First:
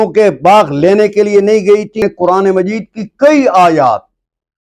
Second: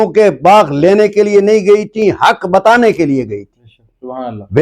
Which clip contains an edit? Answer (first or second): first